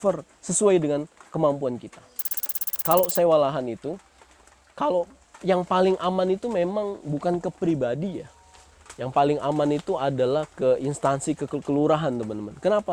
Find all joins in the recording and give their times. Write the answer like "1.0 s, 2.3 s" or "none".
2.7 s